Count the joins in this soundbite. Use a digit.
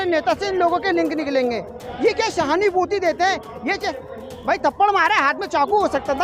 1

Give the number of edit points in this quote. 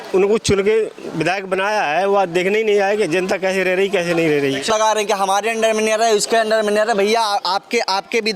1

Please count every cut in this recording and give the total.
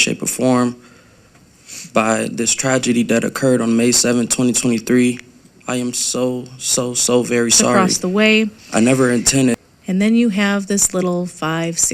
1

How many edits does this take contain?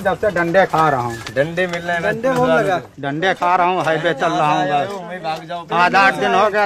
0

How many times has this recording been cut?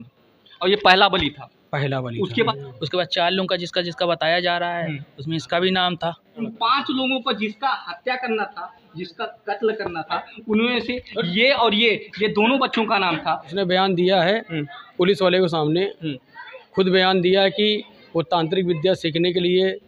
3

